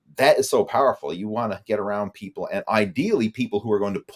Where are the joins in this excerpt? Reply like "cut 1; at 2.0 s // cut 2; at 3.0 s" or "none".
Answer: none